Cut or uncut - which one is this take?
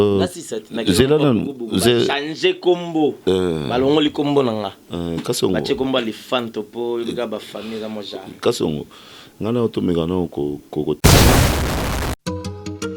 cut